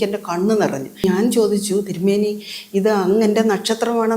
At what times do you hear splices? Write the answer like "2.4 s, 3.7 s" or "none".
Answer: 1.0 s

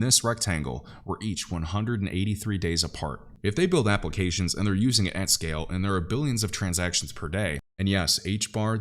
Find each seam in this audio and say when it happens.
3.3 s, 7.6 s

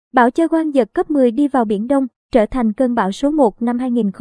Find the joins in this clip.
none

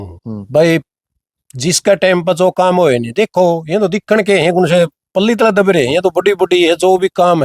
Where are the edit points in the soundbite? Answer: none

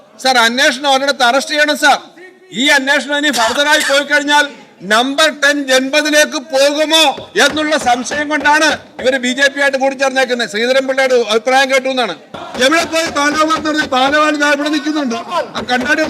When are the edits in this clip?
12.4 s

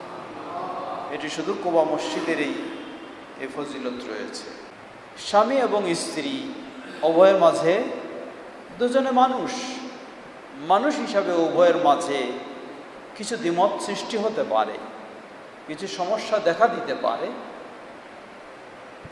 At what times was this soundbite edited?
4.7 s

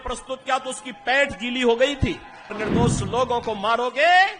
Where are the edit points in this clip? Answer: 2.6 s

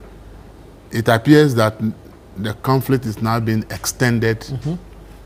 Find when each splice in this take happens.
none

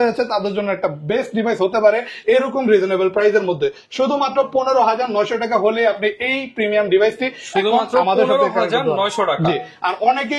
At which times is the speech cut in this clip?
none

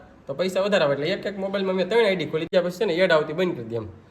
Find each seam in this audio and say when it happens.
2.5 s

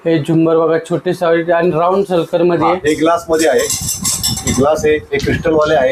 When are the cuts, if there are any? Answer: none

